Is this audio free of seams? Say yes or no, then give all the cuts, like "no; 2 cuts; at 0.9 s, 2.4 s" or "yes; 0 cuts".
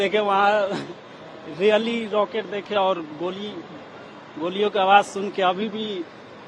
yes; 0 cuts